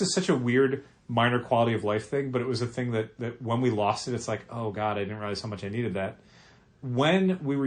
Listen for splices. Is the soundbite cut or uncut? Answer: uncut